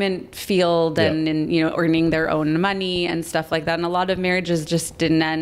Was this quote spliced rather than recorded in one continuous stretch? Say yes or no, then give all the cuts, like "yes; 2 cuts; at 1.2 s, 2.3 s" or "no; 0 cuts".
no; 0 cuts